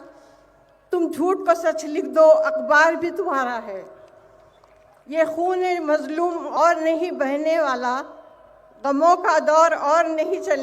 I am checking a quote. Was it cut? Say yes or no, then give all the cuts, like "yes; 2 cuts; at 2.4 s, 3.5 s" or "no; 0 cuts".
yes; 1 cut; at 6.5 s